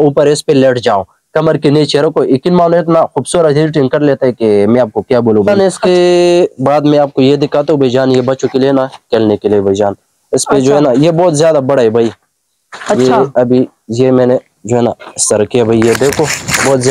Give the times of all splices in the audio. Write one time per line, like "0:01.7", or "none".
0:05.5